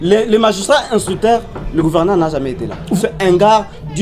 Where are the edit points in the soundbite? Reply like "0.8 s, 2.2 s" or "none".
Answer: 3.0 s